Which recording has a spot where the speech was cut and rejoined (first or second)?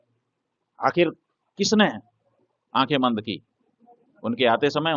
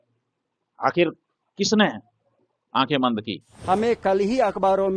second